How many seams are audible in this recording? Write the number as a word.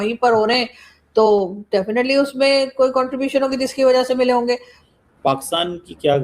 one